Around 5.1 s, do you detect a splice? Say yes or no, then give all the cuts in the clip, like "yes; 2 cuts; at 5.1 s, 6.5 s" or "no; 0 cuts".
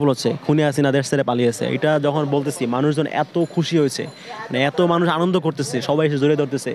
no; 0 cuts